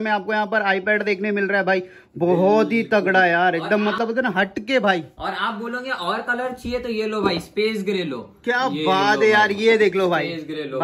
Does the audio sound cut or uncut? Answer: uncut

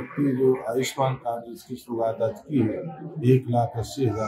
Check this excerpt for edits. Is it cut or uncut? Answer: uncut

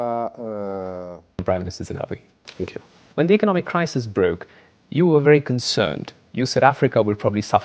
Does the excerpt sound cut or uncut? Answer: cut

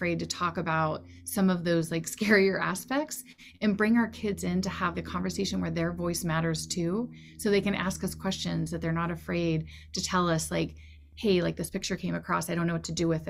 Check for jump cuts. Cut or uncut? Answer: uncut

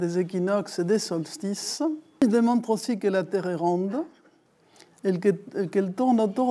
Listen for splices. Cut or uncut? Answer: cut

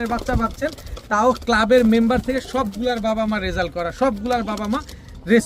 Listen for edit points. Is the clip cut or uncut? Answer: uncut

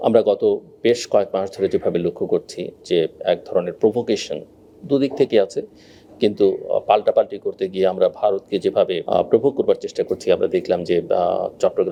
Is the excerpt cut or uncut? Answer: uncut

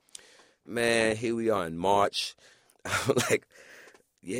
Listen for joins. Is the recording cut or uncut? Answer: cut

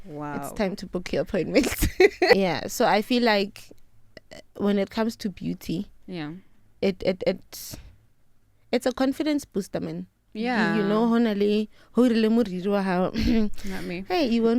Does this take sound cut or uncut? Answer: cut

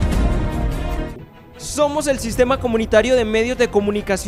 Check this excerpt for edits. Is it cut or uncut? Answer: cut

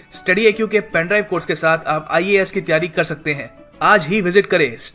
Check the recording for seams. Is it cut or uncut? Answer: uncut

